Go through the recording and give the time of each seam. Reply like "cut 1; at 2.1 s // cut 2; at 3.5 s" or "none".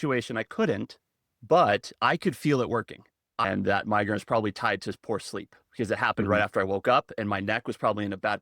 cut 1; at 3.3 s